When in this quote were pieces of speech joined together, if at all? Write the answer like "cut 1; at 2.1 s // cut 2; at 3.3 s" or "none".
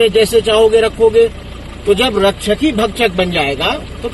none

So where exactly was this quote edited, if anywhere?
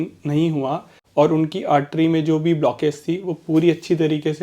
cut 1; at 0.9 s

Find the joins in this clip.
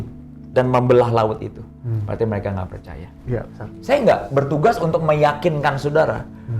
cut 1; at 3.7 s

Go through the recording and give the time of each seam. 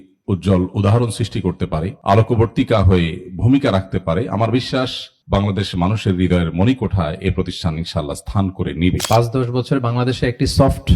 cut 1; at 9.0 s

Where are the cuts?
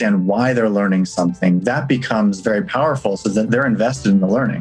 cut 1; at 3.5 s

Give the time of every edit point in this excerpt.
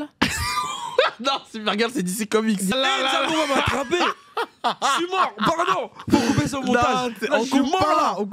cut 1; at 2.7 s

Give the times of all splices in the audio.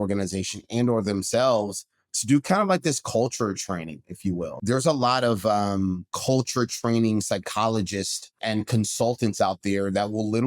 cut 1; at 4.5 s // cut 2; at 6.1 s // cut 3; at 8.4 s

